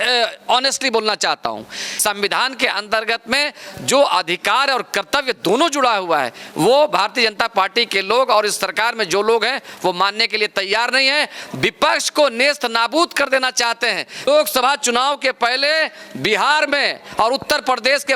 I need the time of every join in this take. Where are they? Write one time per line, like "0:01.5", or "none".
0:01.8
0:14.2